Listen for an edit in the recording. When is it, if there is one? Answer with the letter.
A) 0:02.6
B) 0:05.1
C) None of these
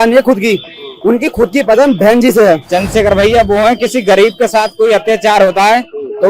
A